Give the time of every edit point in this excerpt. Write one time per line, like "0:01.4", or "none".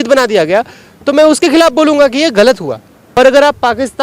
0:03.0

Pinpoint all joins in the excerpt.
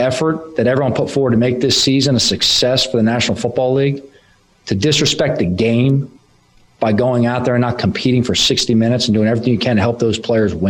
none

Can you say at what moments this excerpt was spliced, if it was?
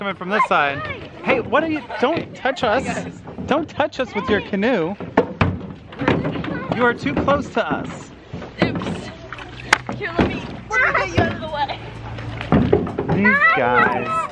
none

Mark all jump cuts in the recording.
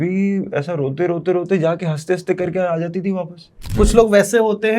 0:03.7

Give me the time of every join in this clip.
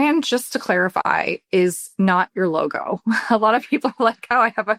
none

